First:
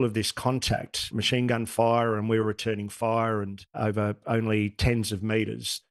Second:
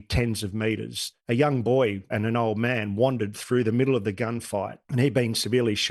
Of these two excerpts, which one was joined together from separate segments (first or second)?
second